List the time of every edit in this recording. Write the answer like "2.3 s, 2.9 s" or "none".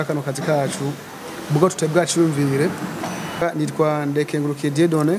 3.4 s